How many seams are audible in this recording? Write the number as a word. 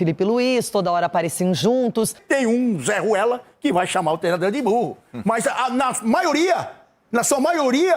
one